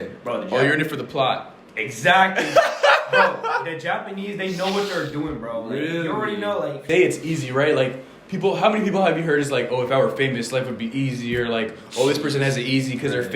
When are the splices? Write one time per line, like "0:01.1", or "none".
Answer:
0:06.8